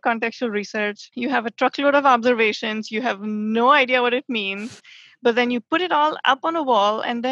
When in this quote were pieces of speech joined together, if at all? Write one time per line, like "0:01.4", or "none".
0:01.0